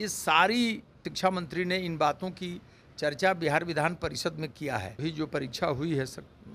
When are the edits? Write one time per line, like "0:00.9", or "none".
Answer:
0:01.0
0:04.9